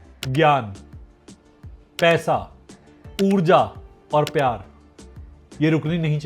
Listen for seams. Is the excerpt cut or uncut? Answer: uncut